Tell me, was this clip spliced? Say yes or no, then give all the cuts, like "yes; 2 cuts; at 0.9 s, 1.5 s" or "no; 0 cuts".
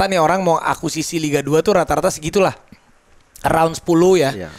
no; 0 cuts